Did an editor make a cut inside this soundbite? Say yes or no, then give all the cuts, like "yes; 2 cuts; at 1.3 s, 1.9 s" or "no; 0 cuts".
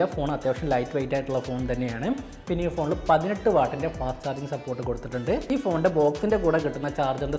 no; 0 cuts